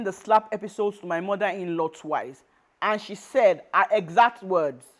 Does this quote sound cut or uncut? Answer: uncut